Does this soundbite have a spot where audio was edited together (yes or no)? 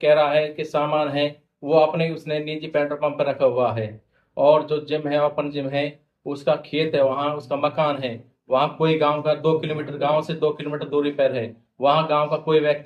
no